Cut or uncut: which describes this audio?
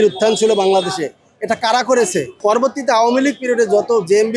cut